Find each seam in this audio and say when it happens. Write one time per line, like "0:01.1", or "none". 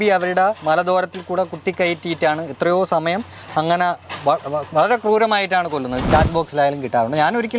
0:06.0